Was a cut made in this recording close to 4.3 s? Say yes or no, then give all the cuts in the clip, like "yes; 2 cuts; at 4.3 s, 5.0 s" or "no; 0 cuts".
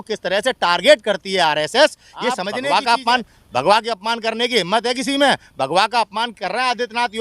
no; 1 cut; at 2.5 s